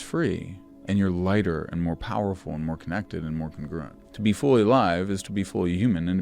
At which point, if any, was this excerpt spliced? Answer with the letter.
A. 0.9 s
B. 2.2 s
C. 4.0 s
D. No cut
C